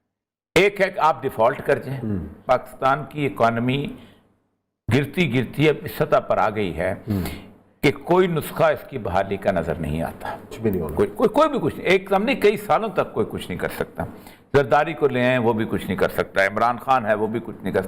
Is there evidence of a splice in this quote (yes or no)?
yes